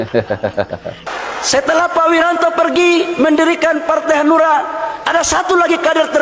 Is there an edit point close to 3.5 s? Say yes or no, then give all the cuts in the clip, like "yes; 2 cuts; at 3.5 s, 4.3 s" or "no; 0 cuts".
no; 1 cut; at 1.1 s